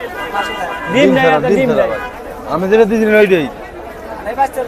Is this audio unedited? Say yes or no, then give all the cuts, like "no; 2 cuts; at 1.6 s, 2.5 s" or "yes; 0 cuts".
yes; 0 cuts